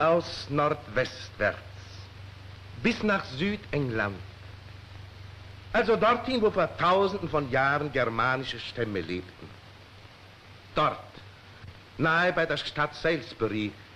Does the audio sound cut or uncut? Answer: cut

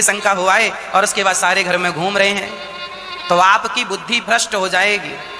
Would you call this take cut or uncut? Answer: uncut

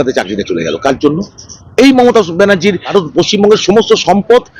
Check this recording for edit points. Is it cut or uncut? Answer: cut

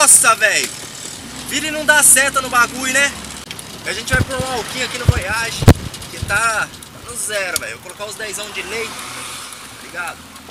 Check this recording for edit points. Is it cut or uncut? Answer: cut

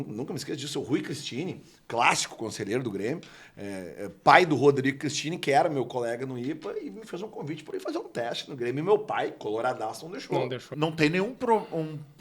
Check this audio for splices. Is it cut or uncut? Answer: cut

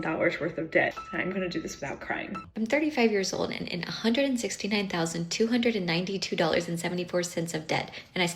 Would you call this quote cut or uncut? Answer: cut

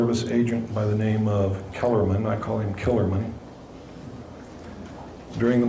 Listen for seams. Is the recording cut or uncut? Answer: uncut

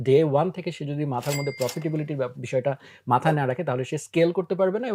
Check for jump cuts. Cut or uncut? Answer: uncut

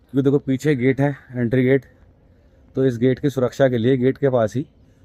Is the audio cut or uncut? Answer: uncut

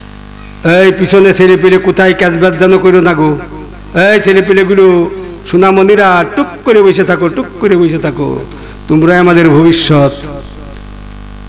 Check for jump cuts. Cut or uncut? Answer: uncut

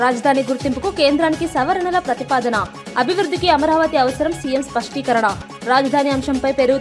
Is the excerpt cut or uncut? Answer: uncut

